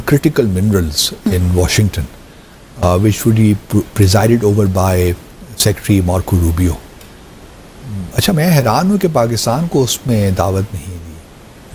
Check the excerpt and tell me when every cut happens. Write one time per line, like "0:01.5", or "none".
none